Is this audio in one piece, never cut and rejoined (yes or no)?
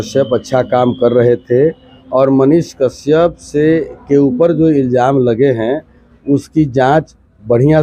yes